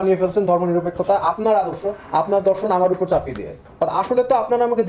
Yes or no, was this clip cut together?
yes